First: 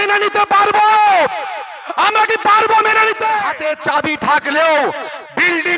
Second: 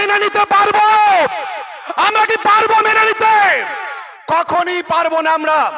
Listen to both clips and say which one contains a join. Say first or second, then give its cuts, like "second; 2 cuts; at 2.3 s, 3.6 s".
first; 1 cut; at 3.5 s